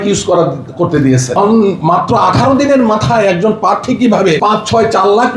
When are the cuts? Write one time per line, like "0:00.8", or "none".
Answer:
0:01.4
0:04.4

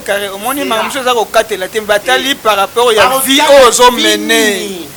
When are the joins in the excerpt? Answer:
none

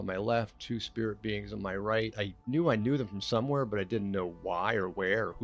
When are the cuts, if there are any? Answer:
0:02.1

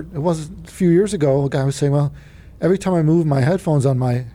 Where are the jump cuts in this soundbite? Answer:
none

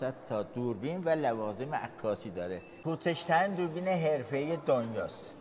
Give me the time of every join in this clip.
0:02.7

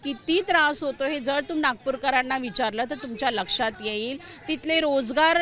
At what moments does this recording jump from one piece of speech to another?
none

